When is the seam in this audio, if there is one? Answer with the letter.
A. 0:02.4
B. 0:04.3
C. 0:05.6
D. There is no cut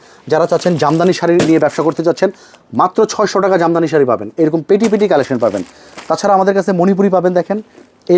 D